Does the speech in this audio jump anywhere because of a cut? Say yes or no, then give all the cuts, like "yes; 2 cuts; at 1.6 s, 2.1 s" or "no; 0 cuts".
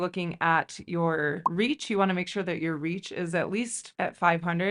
no; 0 cuts